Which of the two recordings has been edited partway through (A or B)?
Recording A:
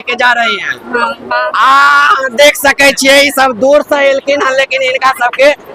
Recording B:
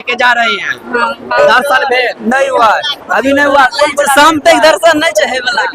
B